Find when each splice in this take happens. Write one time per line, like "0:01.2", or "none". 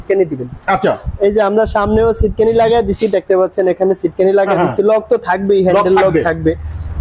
none